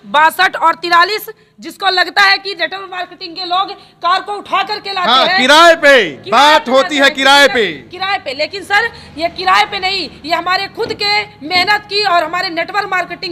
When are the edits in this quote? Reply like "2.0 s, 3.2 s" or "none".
none